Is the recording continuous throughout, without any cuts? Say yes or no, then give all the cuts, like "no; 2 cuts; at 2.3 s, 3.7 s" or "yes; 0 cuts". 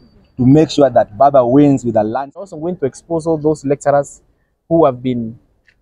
no; 1 cut; at 2.4 s